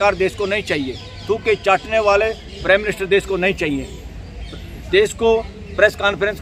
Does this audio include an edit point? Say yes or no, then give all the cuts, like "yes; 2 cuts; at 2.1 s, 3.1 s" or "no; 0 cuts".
no; 0 cuts